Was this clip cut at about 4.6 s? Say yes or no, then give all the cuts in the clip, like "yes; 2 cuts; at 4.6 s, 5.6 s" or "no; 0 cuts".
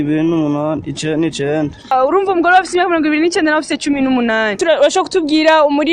yes; 2 cuts; at 1.9 s, 4.6 s